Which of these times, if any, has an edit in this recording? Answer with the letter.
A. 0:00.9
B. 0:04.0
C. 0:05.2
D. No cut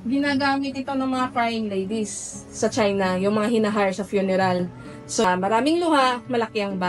C